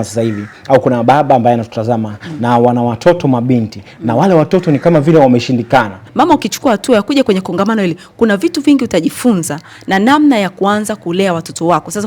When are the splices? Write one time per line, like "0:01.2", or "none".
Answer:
0:06.0